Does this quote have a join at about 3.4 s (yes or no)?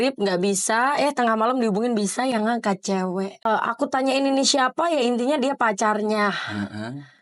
yes